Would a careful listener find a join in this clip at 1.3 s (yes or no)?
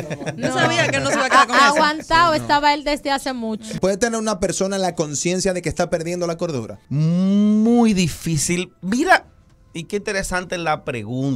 no